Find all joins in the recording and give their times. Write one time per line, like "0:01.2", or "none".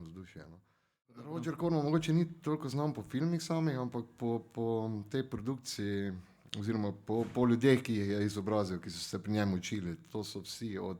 0:01.4